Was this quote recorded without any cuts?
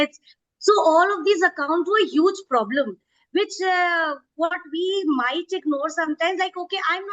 yes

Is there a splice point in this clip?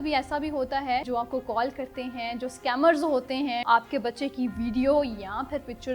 yes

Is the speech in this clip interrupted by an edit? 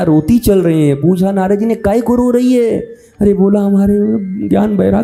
no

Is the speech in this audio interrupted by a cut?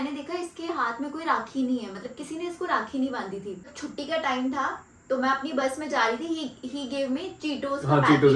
yes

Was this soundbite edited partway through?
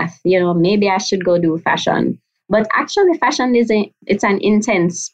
yes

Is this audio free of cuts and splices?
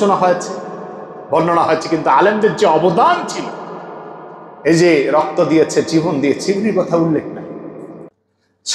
yes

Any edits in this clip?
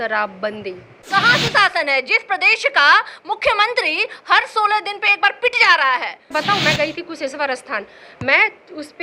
yes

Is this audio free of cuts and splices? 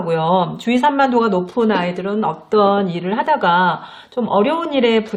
yes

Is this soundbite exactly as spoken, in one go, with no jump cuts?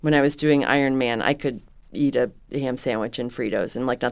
yes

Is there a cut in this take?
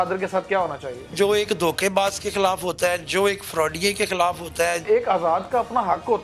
yes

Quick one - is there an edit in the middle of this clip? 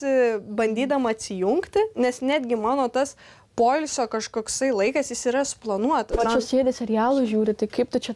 yes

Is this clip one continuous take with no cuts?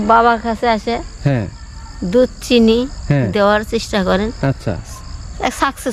yes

